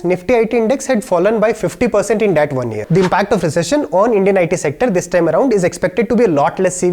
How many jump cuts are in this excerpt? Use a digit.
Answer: 1